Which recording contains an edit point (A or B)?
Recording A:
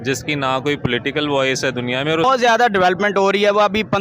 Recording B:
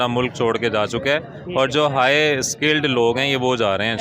A